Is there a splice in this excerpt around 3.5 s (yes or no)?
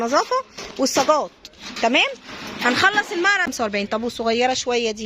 yes